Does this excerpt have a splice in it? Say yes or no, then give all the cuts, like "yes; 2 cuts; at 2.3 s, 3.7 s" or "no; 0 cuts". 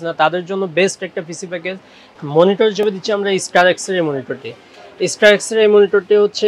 yes; 1 cut; at 2.0 s